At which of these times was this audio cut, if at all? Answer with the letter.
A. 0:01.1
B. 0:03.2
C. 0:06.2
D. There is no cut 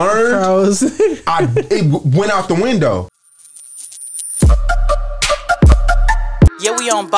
B